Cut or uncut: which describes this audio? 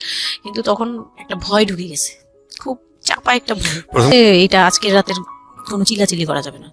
cut